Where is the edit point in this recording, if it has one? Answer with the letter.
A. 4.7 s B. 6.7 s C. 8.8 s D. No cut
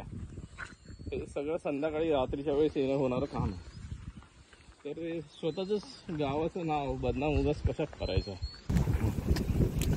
C